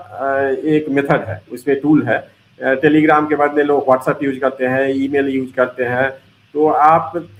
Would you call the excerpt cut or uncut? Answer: uncut